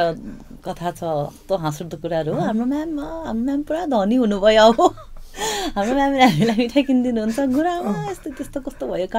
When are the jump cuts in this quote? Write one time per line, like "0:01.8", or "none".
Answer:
none